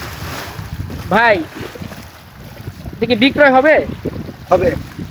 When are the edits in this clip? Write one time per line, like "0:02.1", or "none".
0:00.9